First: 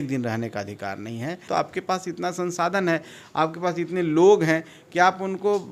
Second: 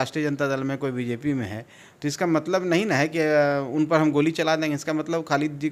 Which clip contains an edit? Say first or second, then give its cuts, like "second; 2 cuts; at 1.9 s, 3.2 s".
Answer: first; 1 cut; at 1.5 s